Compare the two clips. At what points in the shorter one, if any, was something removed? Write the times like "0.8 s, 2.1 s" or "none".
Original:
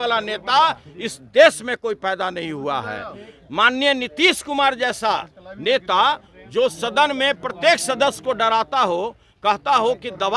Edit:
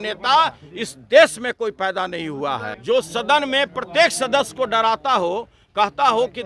2.7 s